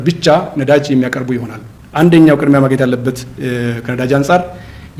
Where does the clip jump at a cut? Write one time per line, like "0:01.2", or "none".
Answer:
none